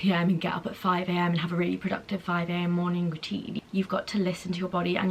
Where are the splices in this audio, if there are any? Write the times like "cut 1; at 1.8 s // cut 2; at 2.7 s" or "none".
cut 1; at 3.5 s